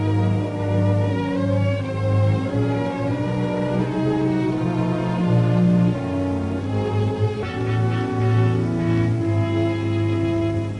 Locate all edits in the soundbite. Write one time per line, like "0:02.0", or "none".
0:04.4